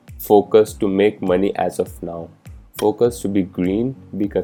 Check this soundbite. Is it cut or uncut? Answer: uncut